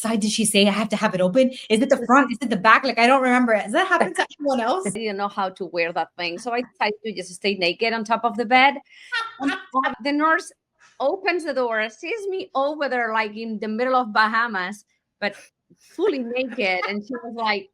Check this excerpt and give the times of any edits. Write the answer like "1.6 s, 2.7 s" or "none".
5.0 s, 10.0 s